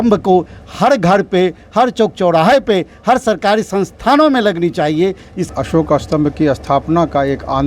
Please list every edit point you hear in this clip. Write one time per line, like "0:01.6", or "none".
0:05.4